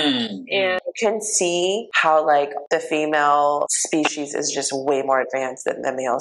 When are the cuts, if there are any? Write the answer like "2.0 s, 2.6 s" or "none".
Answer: 0.8 s, 1.9 s, 2.6 s, 3.8 s